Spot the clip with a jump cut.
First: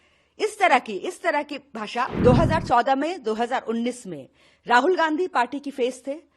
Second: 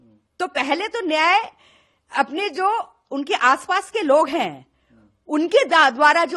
first; 1 cut; at 2.1 s

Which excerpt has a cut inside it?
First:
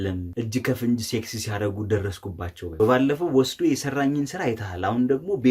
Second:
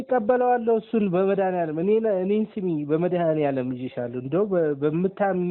first; 1 cut; at 2.7 s

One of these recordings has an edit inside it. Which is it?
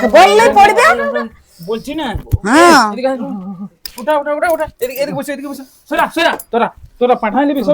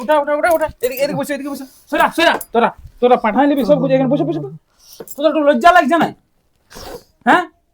second; 1 cut; at 5.1 s

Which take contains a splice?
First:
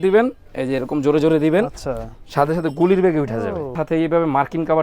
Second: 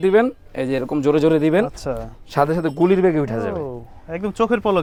first; 1 cut; at 3.8 s

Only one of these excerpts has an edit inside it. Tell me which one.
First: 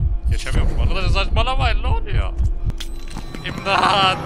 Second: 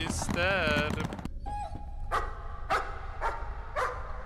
second; 1 cut; at 1.2 s

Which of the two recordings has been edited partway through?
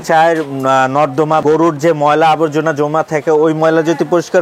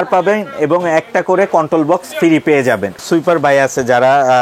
second; 1 cut; at 3.0 s

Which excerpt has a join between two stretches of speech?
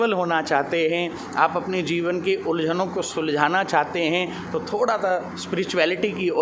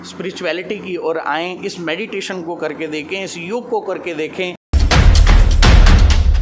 second; 1 cut; at 4.6 s

